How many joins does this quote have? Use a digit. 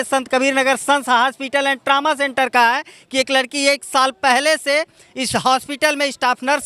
0